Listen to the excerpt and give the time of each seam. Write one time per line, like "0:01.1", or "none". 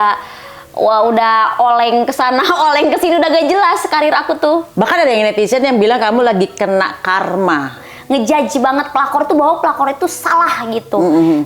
0:04.7
0:07.9